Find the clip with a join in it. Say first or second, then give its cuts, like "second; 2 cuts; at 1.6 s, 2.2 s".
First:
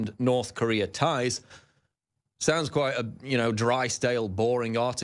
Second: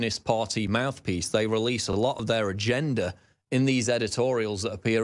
first; 1 cut; at 1.5 s